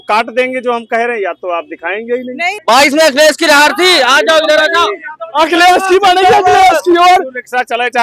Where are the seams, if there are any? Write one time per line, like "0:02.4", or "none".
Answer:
0:02.6